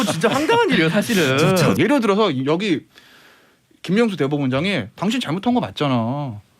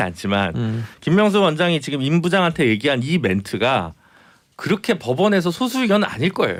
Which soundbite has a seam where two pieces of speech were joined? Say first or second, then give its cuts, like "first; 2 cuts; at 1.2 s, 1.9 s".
first; 1 cut; at 1.8 s